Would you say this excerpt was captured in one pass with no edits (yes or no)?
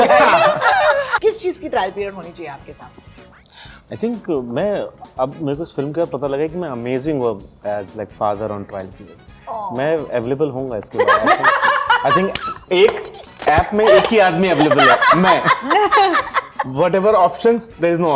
no